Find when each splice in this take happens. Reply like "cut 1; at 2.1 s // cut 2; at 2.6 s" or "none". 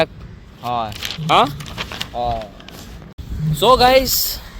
none